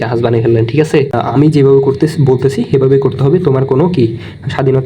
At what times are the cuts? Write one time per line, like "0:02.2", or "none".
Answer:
0:01.2